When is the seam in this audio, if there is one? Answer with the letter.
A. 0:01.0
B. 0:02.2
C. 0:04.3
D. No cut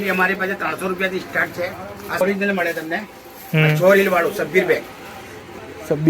B